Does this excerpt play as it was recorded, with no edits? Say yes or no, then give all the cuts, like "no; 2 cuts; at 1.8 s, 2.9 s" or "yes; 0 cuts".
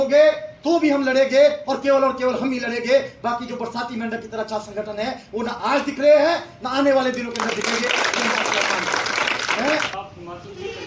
no; 1 cut; at 9.9 s